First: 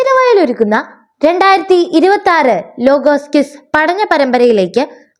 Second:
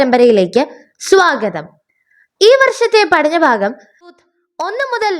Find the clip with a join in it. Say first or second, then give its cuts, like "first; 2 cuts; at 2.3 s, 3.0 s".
second; 1 cut; at 4.2 s